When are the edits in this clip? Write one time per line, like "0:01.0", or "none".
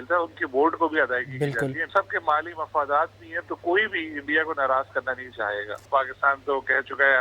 0:01.9
0:05.8